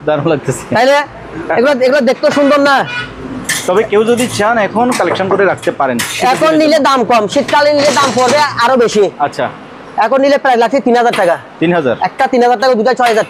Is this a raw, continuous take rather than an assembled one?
yes; 0 cuts

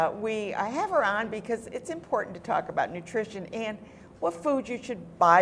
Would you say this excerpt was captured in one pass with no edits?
no; 1 cut; at 2.8 s

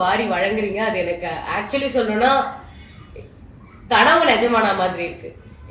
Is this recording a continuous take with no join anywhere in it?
yes; 0 cuts

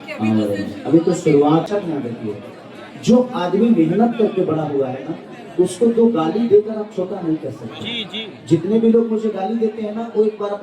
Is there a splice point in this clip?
yes; 1 cut; at 1.7 s

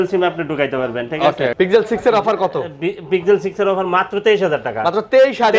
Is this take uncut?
no; 1 cut; at 1.5 s

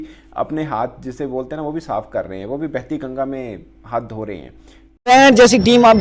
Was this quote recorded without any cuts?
no; 1 cut; at 5.1 s

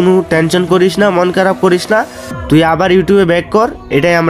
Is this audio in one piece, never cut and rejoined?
yes; 0 cuts

